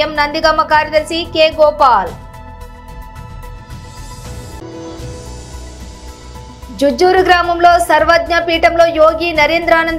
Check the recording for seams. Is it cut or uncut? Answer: uncut